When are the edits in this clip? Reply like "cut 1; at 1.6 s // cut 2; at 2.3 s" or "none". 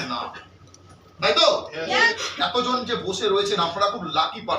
cut 1; at 2.2 s